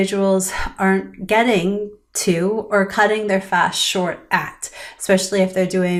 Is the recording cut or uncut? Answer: uncut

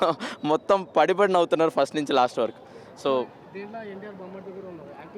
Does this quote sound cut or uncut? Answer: uncut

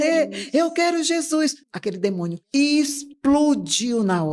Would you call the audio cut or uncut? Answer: uncut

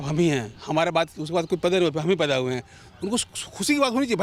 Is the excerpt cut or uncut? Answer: uncut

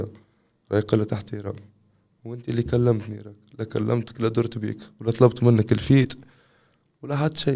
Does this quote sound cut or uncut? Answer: uncut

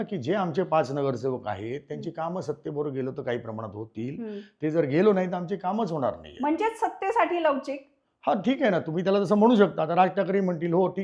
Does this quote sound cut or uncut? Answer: uncut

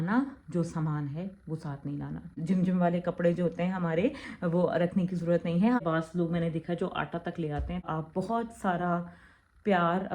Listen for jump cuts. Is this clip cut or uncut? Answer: cut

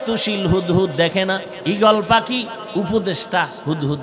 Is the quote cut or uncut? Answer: cut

